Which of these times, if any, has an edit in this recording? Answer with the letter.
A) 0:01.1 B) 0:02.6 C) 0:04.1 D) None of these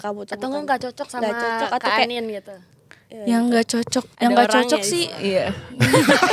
C